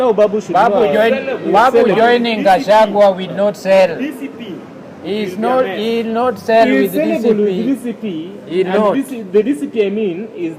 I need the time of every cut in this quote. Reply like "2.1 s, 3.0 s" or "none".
none